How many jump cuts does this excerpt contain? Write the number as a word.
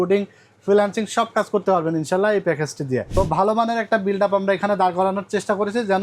one